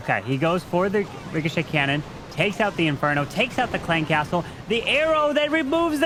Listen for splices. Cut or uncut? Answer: uncut